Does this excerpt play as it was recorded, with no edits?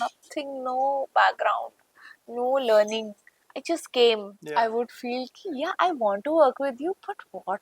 no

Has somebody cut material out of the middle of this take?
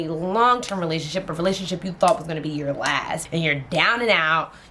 yes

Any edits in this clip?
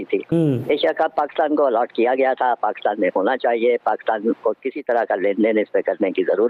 no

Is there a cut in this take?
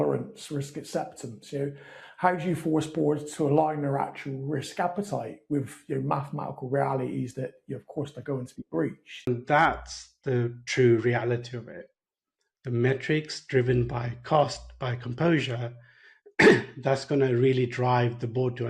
yes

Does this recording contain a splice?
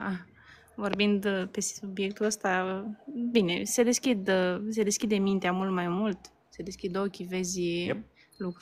no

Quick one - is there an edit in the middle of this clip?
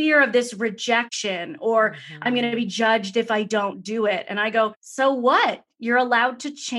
yes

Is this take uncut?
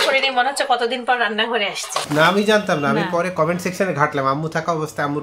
no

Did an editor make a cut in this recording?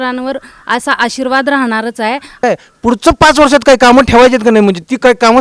yes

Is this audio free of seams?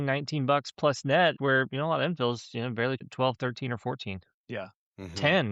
no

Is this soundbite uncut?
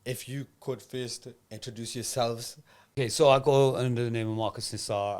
no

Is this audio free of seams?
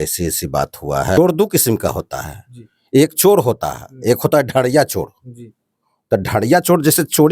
no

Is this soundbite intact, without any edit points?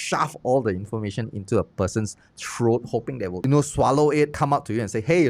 no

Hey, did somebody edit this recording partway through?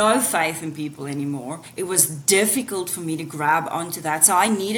yes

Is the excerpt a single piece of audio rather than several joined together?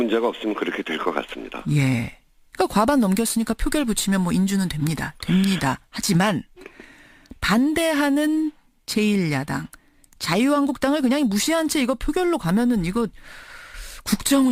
yes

